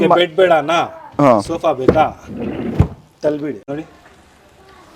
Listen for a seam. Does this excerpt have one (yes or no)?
yes